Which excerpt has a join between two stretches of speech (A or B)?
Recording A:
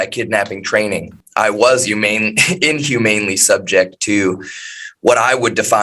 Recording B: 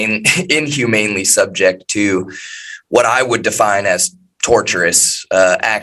A